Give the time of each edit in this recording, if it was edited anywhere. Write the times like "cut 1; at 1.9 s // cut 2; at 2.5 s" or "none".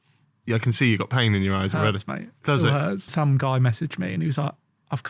cut 1; at 3.1 s